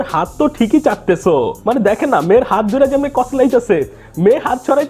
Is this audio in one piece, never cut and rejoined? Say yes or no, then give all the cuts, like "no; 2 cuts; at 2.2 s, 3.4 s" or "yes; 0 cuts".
yes; 0 cuts